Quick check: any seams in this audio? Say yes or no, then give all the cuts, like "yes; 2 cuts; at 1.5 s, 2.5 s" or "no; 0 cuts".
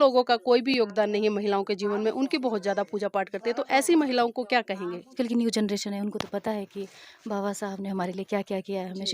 yes; 1 cut; at 5.1 s